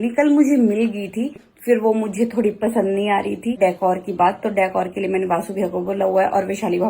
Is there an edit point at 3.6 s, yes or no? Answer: yes